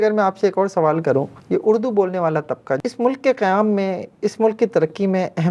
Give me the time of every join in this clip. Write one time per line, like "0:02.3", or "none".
0:01.4
0:02.8